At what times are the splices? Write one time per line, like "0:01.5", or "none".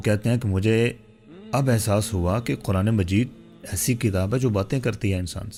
none